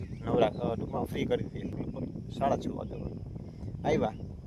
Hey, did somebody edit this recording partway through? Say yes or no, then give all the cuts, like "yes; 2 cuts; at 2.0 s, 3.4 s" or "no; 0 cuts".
yes; 1 cut; at 1.7 s